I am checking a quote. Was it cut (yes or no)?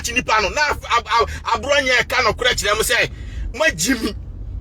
no